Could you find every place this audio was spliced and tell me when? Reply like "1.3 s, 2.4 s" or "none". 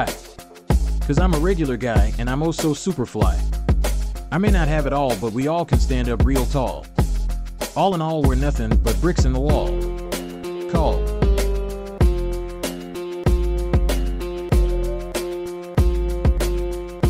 none